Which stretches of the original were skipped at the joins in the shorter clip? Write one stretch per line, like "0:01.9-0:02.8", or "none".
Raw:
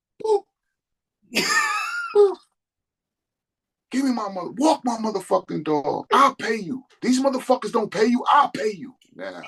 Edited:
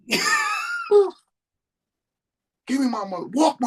none

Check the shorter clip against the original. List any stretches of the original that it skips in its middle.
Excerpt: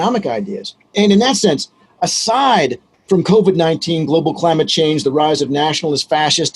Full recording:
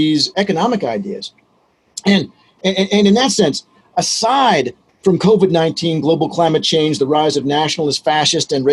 0:01.5-0:02.9

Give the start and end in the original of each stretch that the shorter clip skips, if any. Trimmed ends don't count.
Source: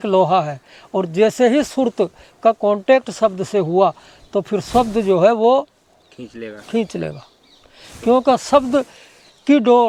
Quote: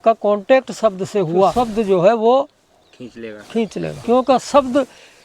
0:03.9-0:04.7
0:07.2-0:08.0

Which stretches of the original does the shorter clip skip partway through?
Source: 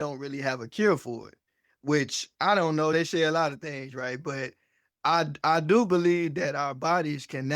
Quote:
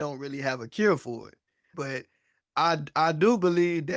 0:01.6-0:04.1

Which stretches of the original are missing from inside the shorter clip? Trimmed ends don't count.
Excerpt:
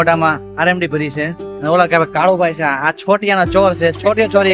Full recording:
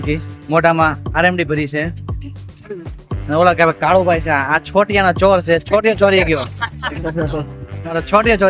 0:02.0-0:03.1

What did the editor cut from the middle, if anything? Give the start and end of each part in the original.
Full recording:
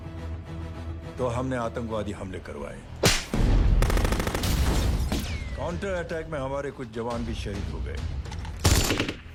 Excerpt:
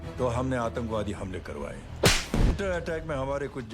0:03.5-0:05.7

